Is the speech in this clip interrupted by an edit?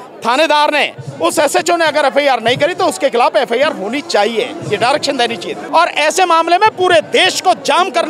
yes; 1 cut; at 5.5 s

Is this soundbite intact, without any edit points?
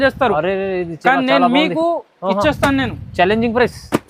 yes; 0 cuts

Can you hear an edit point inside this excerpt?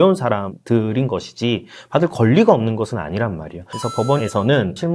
yes; 1 cut; at 3.7 s

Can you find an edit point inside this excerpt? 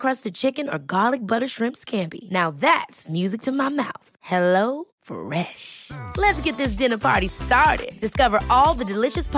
no; 0 cuts

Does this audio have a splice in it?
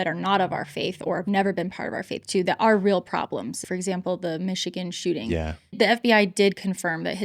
yes; 2 cuts; at 3.6 s, 5.8 s

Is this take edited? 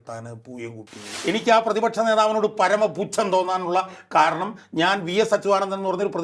yes; 1 cut; at 1.1 s

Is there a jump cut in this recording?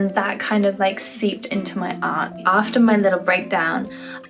yes; 1 cut; at 2.4 s

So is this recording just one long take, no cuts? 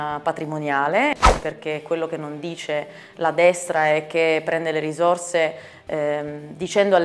no; 1 cut; at 1.1 s

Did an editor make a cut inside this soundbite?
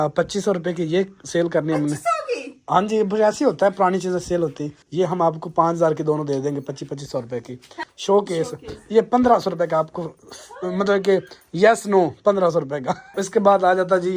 yes; 3 cuts; at 4.8 s, 7.7 s, 13.0 s

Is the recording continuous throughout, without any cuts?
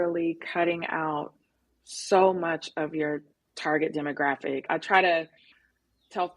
no; 1 cut; at 4.6 s

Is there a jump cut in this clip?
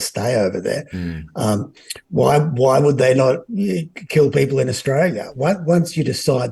no; 0 cuts

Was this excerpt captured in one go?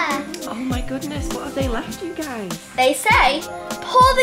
no; 1 cut; at 2.6 s

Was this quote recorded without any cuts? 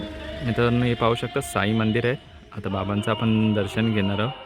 yes; 0 cuts

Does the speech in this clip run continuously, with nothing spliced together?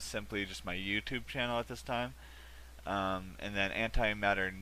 yes; 0 cuts

